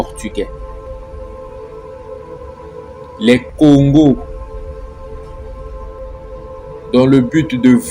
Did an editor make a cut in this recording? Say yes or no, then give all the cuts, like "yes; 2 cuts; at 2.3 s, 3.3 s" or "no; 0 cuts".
no; 0 cuts